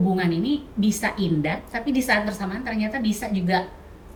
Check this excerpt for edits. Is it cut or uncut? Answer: uncut